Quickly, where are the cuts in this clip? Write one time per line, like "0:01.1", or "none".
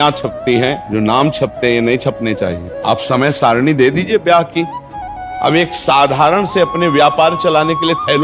0:00.8
0:02.7
0:05.2